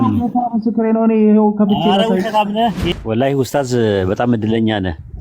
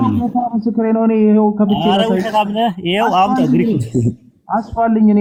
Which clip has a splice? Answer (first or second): first